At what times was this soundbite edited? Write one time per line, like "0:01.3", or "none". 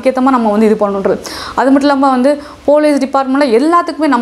none